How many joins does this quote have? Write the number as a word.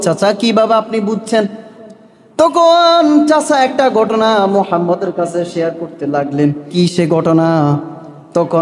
one